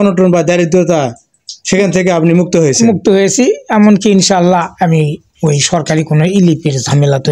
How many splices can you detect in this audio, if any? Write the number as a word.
zero